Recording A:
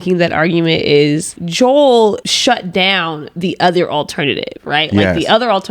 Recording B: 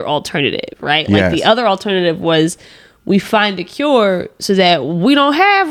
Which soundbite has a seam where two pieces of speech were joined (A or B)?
A